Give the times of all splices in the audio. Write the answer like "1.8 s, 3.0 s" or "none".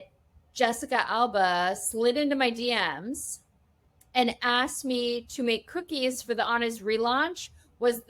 none